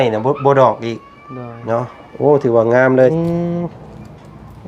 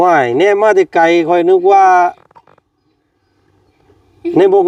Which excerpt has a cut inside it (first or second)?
first